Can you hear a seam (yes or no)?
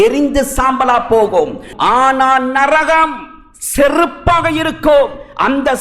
yes